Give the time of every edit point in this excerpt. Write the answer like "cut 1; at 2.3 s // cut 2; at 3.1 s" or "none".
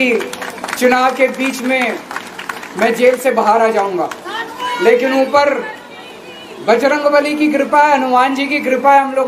none